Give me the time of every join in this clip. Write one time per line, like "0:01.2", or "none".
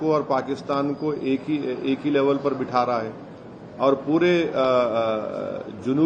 none